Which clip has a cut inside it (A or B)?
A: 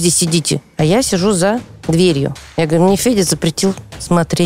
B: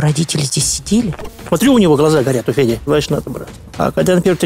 B